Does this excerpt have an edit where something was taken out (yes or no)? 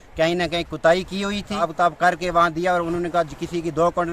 yes